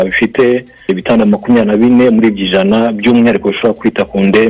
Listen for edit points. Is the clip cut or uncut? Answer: uncut